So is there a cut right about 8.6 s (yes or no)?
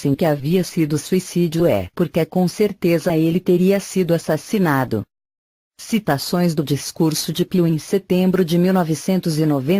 yes